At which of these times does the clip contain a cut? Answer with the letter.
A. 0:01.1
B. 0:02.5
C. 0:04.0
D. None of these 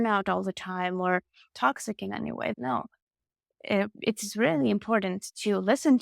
B